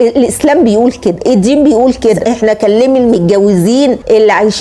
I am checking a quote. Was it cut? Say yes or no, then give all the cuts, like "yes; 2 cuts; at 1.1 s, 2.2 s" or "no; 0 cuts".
yes; 1 cut; at 2.2 s